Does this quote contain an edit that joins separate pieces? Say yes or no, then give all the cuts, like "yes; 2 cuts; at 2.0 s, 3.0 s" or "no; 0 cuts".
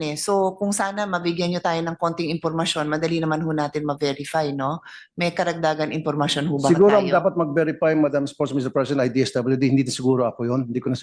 no; 0 cuts